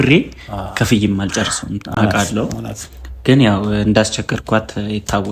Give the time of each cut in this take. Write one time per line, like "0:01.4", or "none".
none